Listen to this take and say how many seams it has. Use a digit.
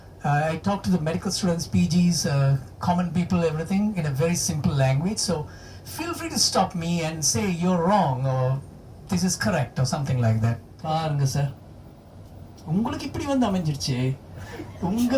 1